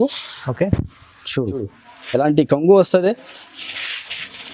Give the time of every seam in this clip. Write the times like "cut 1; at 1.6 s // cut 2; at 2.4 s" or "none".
cut 1; at 1.6 s